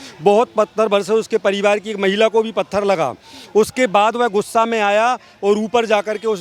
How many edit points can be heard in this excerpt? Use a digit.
0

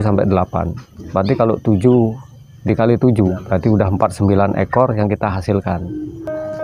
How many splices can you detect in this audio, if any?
1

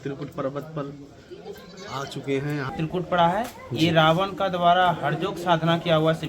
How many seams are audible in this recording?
1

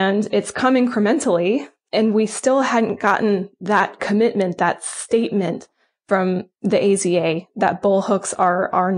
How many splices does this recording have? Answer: 1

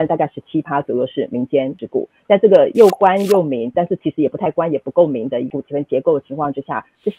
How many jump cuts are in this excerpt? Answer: 2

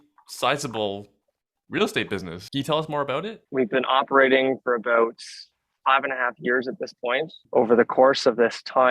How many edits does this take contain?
3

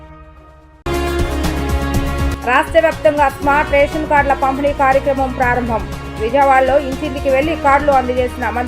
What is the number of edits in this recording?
0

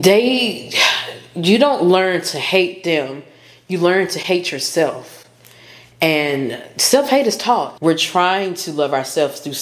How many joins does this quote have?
1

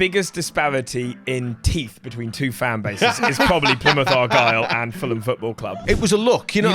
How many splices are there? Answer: 1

